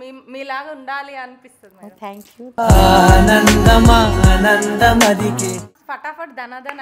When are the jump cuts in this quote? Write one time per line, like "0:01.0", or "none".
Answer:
0:05.7